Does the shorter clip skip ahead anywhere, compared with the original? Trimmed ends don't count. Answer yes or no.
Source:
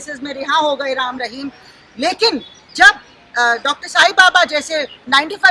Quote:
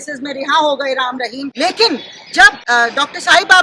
yes